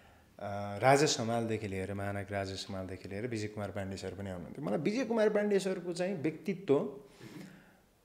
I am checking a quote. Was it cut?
no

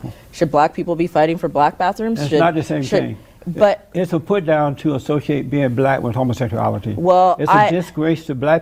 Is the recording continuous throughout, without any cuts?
yes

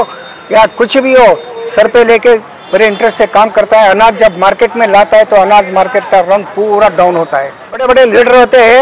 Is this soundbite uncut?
no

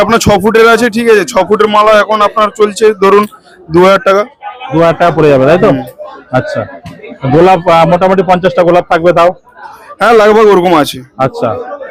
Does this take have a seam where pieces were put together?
no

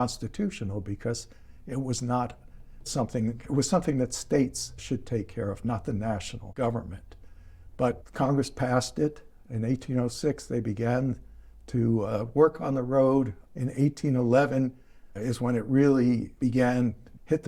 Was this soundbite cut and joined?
no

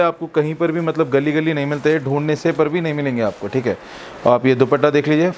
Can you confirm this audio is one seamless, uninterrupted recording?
yes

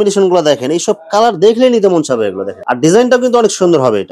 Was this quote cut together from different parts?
no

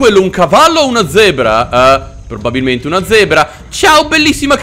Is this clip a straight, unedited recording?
yes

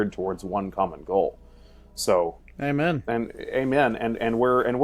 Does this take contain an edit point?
no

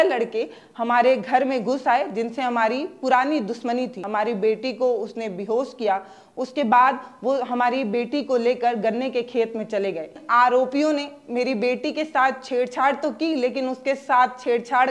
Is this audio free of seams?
no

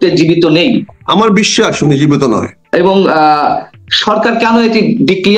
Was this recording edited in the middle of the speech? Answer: yes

